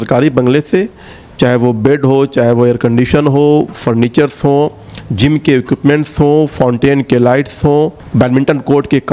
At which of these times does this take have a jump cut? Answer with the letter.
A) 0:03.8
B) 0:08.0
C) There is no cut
B